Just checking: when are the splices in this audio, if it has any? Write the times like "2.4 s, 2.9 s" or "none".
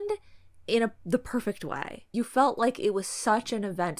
2.0 s